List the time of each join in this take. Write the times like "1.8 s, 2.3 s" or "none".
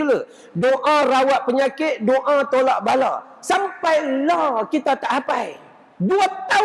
none